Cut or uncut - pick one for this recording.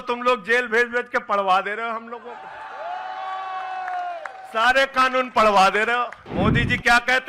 cut